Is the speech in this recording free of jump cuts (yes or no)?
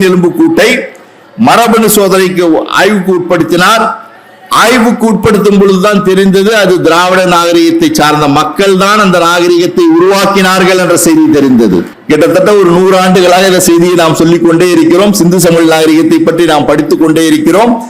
no